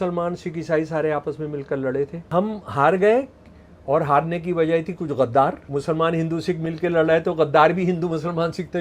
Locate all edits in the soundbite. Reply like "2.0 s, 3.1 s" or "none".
2.2 s, 5.6 s